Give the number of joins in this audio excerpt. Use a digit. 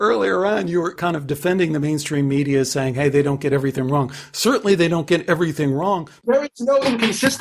2